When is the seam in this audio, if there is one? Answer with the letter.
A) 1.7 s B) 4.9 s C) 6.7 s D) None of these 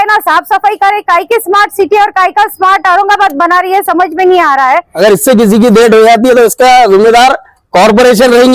B